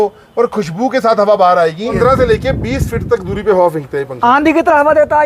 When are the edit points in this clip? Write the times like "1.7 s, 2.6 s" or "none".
2.0 s